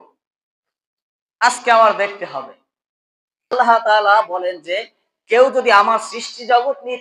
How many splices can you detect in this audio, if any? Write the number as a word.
one